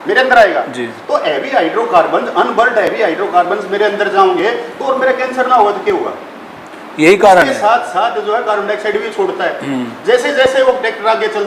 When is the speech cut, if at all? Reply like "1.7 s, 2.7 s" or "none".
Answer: none